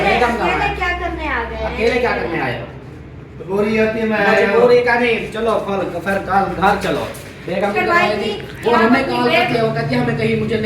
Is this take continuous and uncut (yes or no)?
no